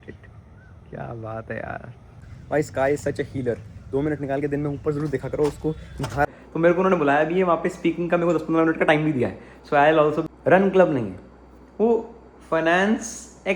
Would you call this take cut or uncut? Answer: cut